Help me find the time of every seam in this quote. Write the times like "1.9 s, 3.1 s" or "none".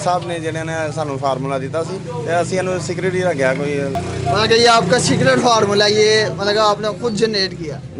none